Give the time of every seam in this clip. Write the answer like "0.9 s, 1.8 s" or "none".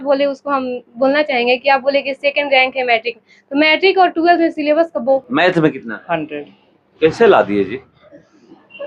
5.2 s